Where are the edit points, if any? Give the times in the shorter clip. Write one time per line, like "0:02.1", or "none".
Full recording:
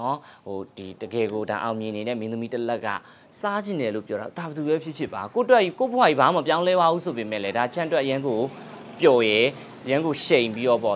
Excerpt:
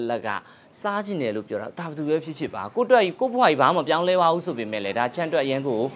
none